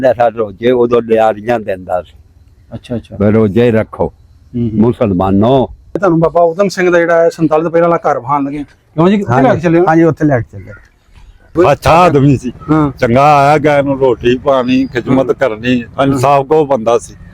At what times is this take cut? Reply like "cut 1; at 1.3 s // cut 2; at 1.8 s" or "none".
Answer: cut 1; at 6.0 s // cut 2; at 11.5 s